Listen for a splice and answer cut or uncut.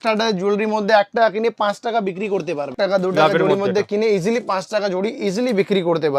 cut